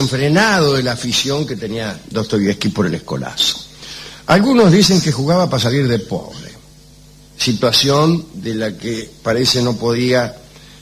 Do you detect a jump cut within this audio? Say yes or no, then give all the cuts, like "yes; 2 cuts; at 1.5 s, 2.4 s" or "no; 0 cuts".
yes; 1 cut; at 2.0 s